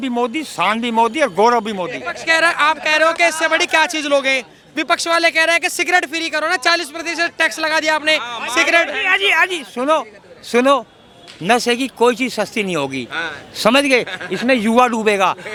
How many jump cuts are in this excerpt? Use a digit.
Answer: 0